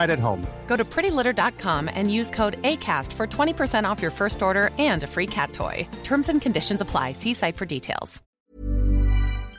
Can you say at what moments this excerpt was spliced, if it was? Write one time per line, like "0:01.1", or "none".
0:08.3